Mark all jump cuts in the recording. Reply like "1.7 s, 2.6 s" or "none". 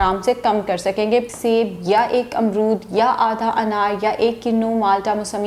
1.3 s